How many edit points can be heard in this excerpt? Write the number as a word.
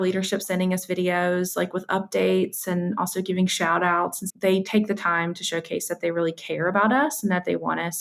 one